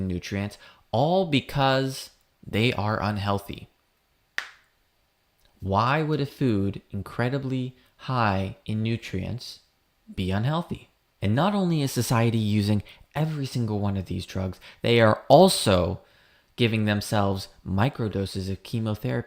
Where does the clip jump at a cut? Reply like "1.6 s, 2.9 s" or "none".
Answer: 11.3 s